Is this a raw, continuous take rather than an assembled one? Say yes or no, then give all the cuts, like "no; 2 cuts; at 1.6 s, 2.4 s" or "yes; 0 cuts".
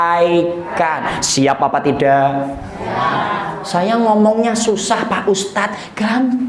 yes; 0 cuts